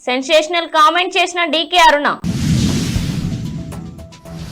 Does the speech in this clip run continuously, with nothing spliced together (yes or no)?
no